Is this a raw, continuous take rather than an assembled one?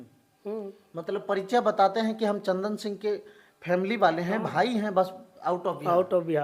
yes; 0 cuts

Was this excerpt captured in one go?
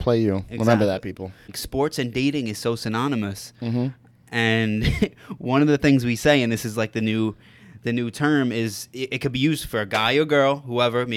no; 1 cut; at 1.6 s

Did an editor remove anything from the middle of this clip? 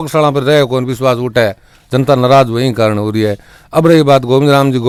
no; 0 cuts

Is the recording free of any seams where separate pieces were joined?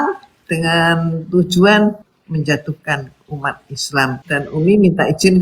no; 2 cuts; at 2.1 s, 4.2 s

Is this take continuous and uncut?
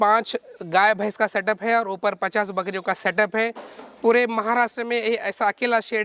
yes; 0 cuts

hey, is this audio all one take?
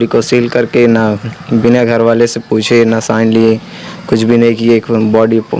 yes; 0 cuts

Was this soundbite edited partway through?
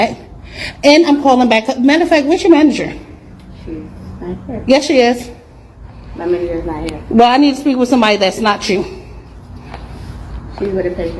yes; 2 cuts; at 6.8 s, 7.8 s

